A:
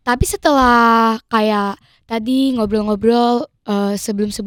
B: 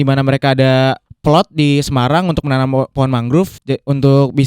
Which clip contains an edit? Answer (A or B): B